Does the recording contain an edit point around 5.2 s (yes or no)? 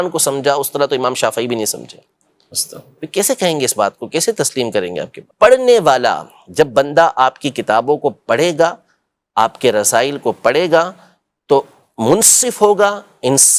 yes